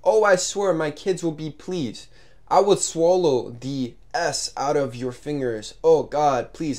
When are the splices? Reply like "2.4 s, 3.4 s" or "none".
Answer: none